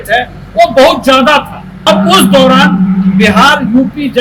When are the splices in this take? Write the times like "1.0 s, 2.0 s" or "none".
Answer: 1.9 s